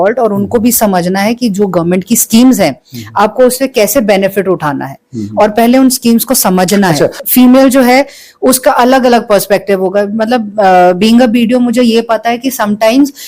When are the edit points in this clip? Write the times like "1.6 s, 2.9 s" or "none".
7.1 s